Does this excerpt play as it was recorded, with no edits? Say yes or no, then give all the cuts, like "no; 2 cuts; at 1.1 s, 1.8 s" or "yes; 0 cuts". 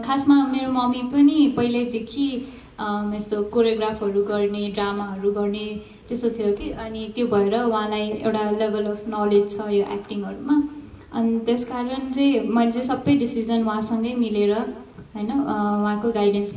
yes; 0 cuts